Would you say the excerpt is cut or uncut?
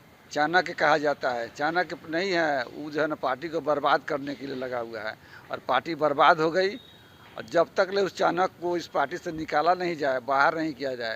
uncut